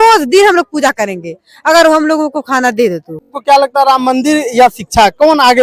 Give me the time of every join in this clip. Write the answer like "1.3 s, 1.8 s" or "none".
3.4 s